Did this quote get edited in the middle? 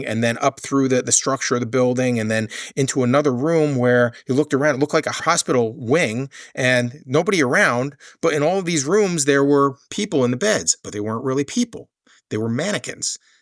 yes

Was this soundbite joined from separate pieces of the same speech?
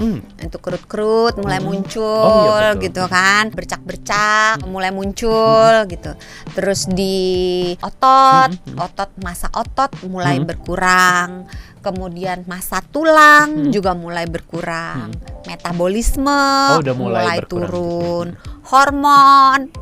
no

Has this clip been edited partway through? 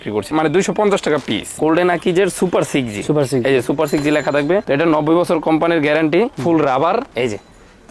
yes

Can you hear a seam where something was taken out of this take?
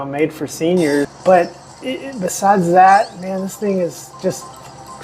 yes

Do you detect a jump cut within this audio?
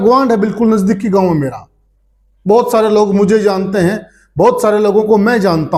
no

